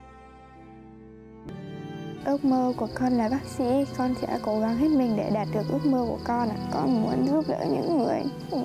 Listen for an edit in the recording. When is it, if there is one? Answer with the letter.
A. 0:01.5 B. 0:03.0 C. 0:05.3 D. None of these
A